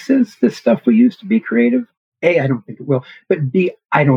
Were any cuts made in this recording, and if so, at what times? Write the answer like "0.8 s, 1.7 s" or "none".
2.0 s